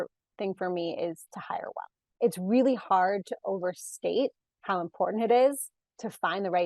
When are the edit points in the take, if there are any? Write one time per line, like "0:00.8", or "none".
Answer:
0:02.0